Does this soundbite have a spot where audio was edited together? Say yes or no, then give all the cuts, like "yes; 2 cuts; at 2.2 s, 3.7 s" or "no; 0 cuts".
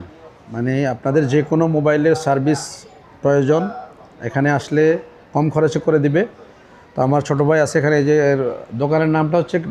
no; 0 cuts